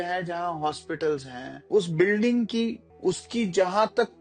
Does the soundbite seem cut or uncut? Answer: cut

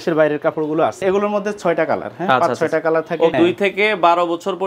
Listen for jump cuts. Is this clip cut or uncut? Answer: cut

